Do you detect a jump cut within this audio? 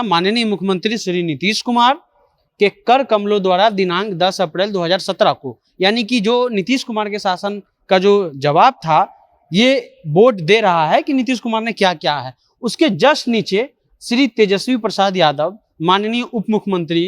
no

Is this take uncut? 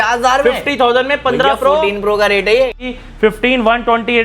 no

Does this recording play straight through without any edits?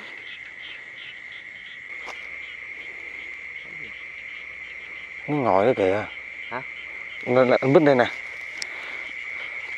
no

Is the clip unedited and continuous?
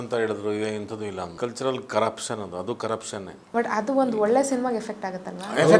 no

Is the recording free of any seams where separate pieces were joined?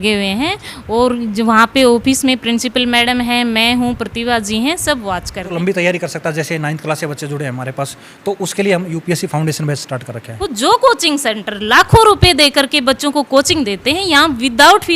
no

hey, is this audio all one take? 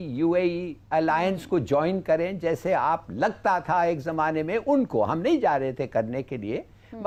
yes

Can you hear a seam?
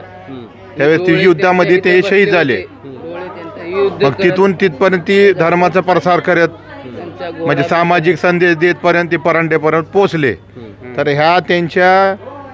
no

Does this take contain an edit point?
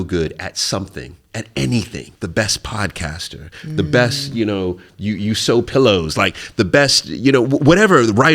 yes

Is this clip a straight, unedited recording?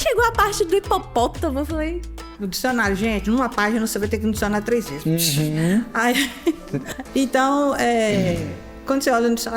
no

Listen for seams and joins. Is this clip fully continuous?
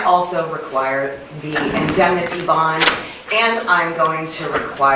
yes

